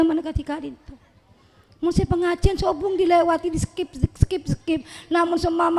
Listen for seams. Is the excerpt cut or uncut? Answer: uncut